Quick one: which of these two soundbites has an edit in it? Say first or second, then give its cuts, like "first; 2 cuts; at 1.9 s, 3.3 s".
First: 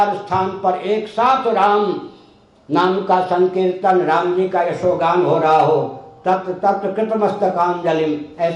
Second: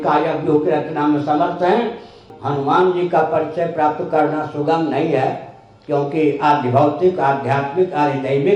second; 1 cut; at 2.3 s